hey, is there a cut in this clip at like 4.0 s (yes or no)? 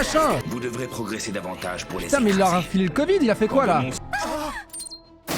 yes